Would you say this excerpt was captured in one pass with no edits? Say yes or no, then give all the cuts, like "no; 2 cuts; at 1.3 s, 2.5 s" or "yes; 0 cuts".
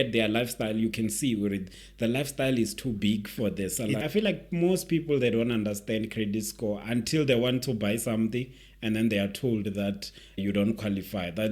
no; 2 cuts; at 4.0 s, 10.4 s